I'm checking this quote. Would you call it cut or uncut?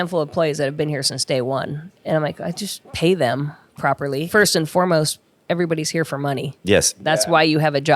cut